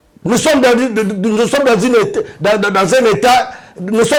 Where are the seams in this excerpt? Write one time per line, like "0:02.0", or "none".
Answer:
none